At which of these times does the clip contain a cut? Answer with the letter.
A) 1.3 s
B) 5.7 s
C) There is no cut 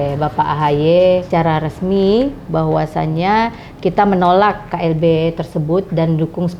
A